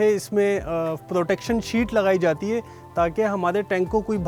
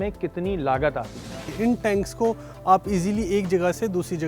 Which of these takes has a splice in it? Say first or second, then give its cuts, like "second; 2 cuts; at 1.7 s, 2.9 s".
second; 1 cut; at 1.4 s